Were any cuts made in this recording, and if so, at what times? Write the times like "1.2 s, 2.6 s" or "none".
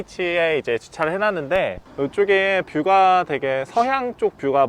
1.8 s